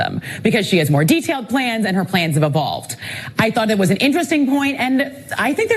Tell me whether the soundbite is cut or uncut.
cut